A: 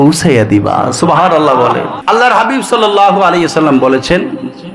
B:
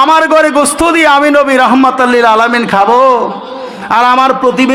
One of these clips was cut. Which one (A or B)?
A